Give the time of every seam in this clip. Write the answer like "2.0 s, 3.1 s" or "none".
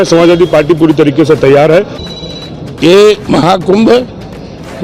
2.0 s